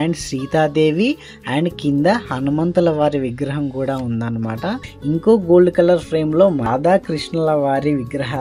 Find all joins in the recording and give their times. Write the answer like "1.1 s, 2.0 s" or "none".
4.9 s